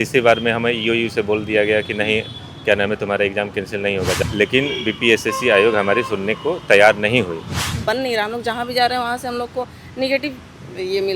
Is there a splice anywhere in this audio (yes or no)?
yes